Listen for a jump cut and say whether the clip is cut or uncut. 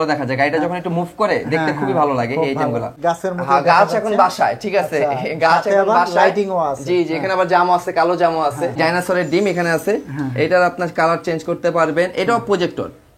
cut